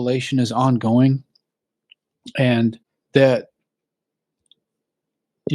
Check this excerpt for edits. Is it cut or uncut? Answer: cut